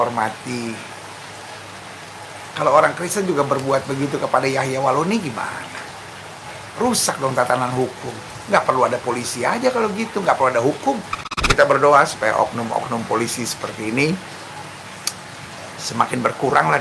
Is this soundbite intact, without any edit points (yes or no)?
no